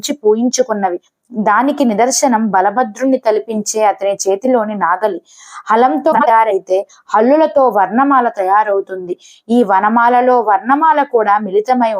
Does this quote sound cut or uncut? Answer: cut